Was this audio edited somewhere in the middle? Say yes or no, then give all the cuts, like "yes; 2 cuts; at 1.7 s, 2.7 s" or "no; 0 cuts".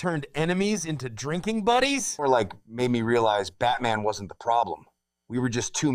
yes; 1 cut; at 2.1 s